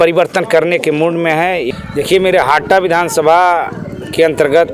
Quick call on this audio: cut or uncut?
cut